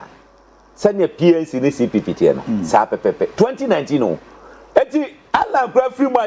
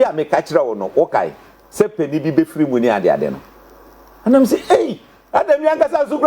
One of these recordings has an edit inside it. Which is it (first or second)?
first